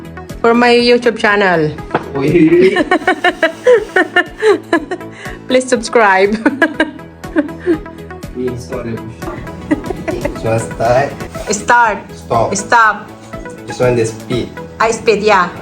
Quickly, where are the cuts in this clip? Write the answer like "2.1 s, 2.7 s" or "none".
10.4 s